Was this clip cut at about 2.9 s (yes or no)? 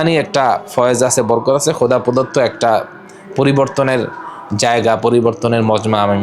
no